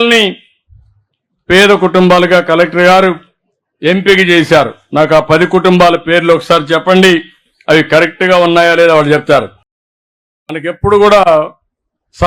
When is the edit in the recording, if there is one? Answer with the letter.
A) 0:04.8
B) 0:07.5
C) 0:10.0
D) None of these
C